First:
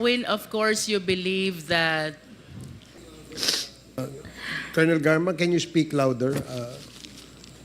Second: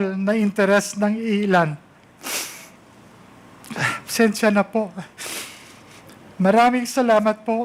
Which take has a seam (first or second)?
first